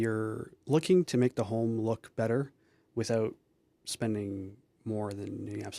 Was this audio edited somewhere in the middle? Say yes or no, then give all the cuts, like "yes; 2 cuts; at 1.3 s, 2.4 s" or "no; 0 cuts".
no; 0 cuts